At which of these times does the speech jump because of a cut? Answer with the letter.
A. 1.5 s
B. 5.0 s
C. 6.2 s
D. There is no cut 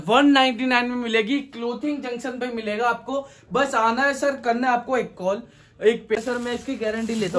C